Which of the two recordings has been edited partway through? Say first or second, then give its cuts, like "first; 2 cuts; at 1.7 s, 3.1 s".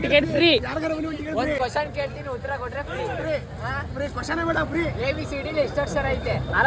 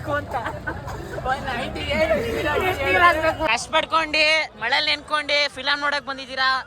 second; 1 cut; at 3.3 s